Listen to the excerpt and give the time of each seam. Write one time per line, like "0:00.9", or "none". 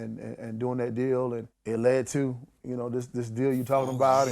0:01.5

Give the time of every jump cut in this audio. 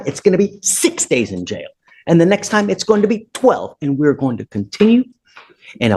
none

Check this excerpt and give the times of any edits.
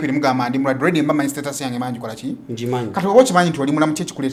none

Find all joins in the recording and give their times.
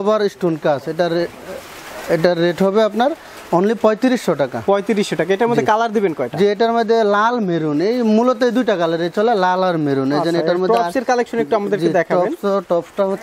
none

